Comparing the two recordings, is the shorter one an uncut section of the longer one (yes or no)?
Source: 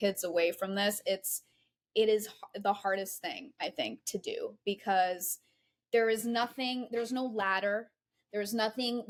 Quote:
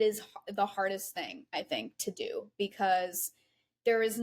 yes